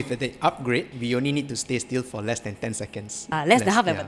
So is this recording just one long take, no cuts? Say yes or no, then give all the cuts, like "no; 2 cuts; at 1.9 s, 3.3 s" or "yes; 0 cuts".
no; 2 cuts; at 0.9 s, 3.2 s